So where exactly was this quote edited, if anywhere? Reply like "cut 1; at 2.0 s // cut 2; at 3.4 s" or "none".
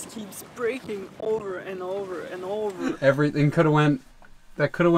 cut 1; at 3.0 s